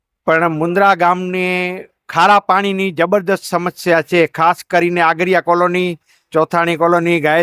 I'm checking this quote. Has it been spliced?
no; 0 cuts

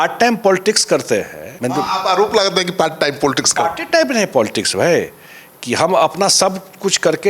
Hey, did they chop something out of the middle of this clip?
yes; 1 cut; at 1.4 s

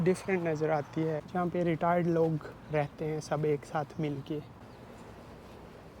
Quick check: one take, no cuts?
no; 2 cuts; at 1.2 s, 4.6 s

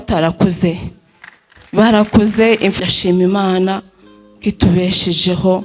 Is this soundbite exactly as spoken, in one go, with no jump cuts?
no; 1 cut; at 2.7 s

